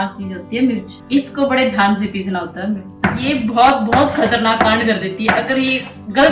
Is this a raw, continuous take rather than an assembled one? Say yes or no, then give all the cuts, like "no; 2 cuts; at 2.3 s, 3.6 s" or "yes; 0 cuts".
no; 2 cuts; at 0.9 s, 2.9 s